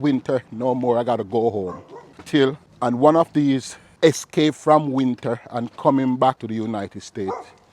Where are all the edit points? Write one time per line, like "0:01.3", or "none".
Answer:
0:02.5
0:03.8
0:06.4